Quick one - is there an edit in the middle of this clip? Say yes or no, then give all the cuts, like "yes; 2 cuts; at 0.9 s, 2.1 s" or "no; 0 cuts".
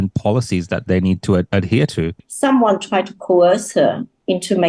yes; 1 cut; at 2.2 s